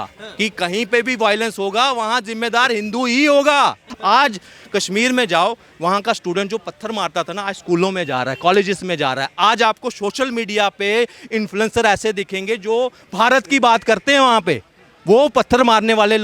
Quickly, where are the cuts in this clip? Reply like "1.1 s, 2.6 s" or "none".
3.9 s